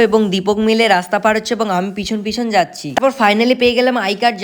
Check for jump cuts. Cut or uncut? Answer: cut